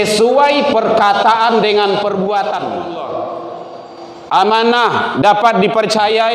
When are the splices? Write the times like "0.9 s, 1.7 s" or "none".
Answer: 2.8 s